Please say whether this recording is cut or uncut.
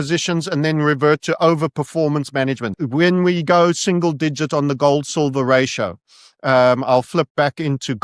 cut